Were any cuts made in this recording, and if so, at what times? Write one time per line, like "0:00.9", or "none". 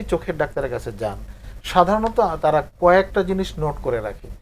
none